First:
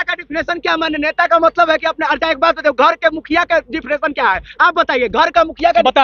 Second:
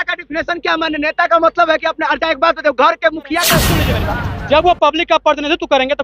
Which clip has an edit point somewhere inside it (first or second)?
second